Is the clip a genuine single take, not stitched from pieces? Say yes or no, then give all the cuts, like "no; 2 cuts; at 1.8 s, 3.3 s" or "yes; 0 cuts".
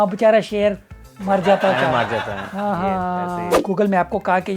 no; 1 cut; at 3.6 s